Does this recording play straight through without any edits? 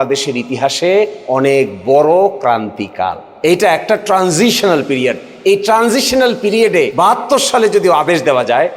no; 2 cuts; at 3.2 s, 6.9 s

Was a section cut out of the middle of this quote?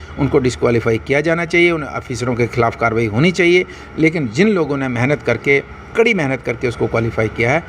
no; 0 cuts

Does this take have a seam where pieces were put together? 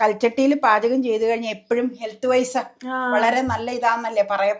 no; 0 cuts

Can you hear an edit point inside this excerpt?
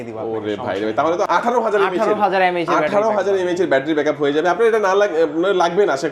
no; 0 cuts

